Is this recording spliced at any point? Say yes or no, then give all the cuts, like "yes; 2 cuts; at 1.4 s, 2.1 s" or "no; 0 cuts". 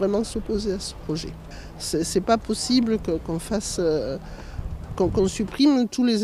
yes; 1 cut; at 3.0 s